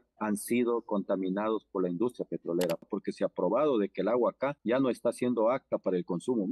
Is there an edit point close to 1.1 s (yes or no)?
no